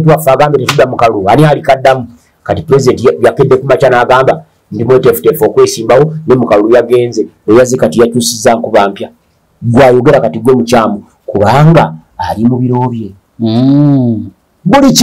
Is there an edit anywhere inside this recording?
no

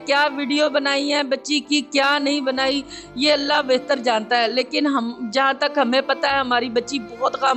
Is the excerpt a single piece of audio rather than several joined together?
yes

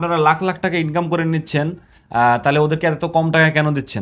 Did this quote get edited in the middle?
no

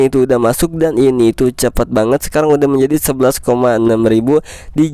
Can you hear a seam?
no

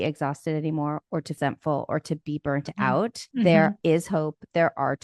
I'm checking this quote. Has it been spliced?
yes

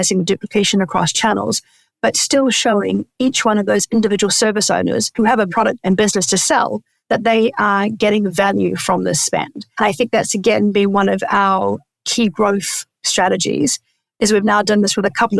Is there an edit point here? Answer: yes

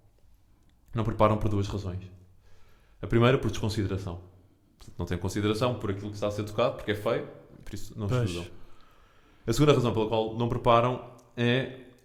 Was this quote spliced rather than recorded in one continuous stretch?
no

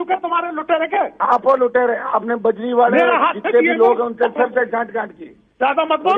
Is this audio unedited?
yes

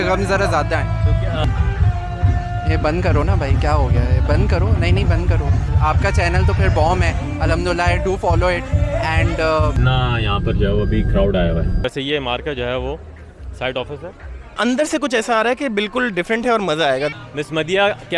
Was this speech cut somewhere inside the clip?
yes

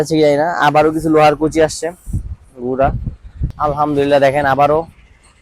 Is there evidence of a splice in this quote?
yes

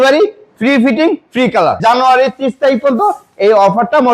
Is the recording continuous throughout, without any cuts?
no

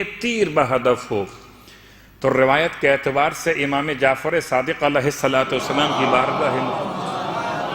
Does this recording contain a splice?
no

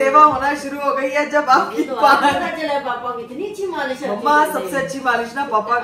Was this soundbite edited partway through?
no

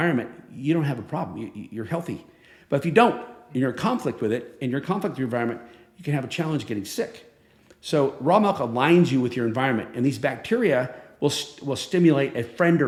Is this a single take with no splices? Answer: yes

